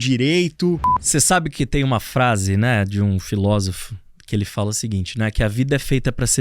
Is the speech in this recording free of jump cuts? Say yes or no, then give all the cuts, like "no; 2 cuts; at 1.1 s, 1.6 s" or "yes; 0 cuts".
no; 1 cut; at 0.9 s